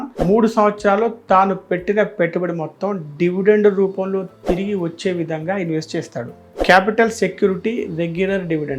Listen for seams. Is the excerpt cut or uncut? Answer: uncut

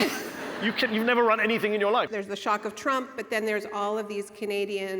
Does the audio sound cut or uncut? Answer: cut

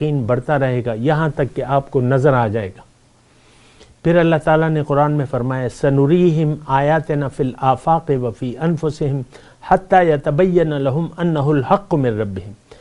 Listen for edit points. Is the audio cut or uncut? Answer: uncut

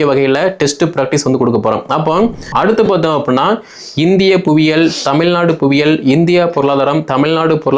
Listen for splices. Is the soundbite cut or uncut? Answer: cut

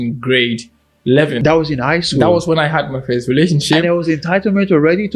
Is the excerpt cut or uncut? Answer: cut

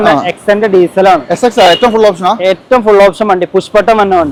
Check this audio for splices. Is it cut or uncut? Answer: uncut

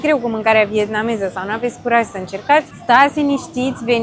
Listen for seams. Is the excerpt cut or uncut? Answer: cut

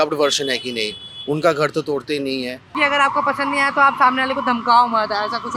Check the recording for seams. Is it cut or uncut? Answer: cut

